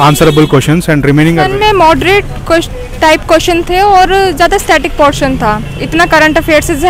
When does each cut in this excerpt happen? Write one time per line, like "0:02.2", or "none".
0:01.4